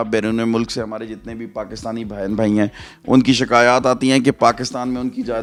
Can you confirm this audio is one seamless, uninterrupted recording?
yes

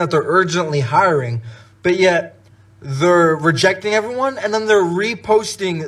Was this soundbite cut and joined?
no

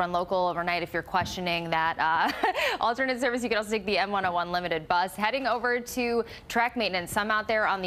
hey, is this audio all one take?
no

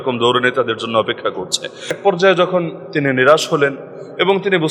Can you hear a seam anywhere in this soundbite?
yes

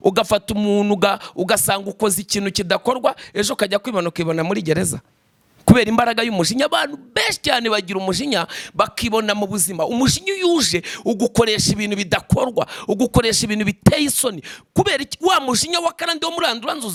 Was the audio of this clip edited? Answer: no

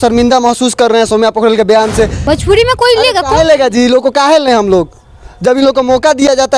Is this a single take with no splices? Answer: no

